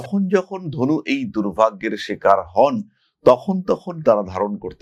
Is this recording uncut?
yes; 0 cuts

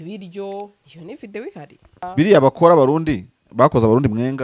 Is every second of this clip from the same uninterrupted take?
no; 1 cut; at 2.1 s

